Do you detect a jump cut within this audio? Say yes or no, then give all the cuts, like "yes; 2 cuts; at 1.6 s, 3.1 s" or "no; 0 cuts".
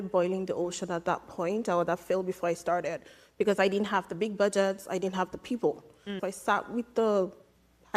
yes; 1 cut; at 6.2 s